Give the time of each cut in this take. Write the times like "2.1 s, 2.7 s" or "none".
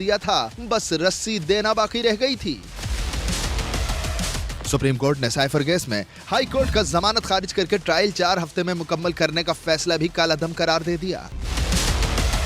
11.3 s